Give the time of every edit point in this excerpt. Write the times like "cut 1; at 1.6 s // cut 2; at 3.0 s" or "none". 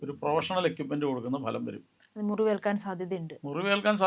cut 1; at 1.9 s

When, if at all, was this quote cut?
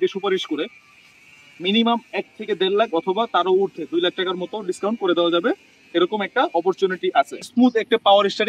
cut 1; at 7.4 s

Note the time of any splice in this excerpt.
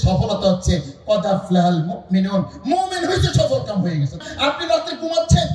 cut 1; at 4.2 s

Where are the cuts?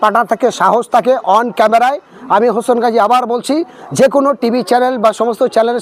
none

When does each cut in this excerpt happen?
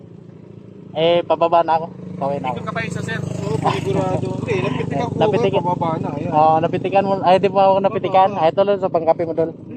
none

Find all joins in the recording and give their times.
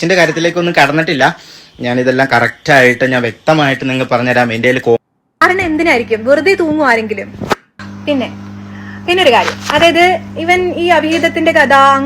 cut 1; at 5.0 s

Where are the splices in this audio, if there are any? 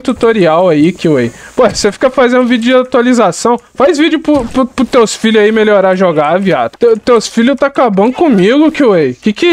cut 1; at 6.7 s

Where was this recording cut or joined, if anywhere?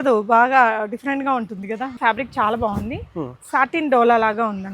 cut 1; at 2.0 s

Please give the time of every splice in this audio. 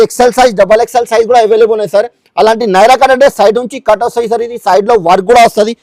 none

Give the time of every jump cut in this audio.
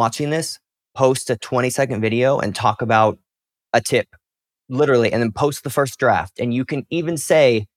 none

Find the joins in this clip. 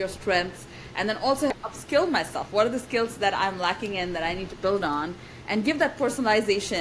cut 1; at 1.5 s

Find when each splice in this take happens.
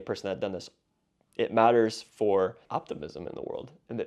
cut 1; at 2.6 s

